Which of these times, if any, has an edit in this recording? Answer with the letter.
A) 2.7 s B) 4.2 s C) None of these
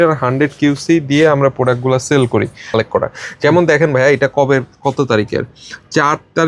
A